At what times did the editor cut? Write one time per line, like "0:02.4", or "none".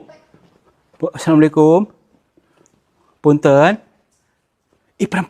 none